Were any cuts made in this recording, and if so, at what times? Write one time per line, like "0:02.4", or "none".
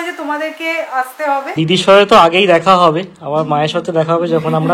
0:01.6